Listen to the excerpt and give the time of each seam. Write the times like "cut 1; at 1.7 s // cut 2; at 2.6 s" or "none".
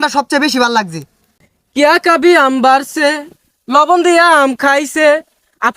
cut 1; at 1.3 s